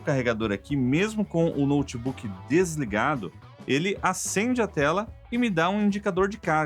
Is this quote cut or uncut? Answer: uncut